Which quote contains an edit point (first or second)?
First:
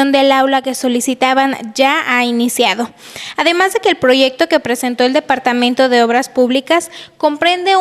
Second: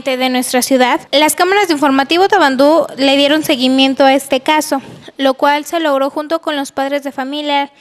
second